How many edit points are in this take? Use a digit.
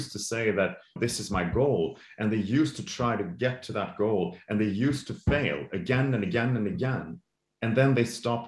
0